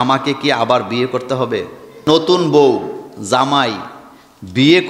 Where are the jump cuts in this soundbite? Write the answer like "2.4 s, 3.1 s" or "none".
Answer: 1.9 s